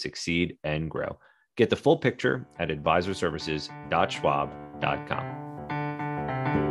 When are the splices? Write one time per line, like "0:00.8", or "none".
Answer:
0:05.2